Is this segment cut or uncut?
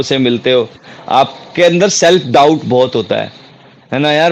uncut